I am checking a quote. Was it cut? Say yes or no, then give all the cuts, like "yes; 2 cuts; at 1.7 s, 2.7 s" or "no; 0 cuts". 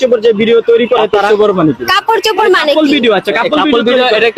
no; 0 cuts